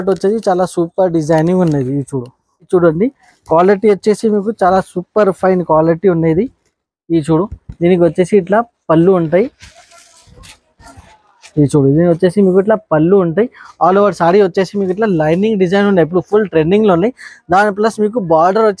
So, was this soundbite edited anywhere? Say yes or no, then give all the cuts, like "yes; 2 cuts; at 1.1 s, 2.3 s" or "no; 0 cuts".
yes; 1 cut; at 2.7 s